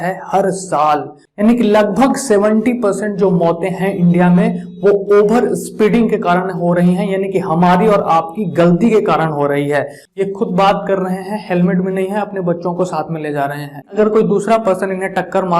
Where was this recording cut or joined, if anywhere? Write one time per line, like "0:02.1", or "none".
0:01.2
0:10.0
0:13.9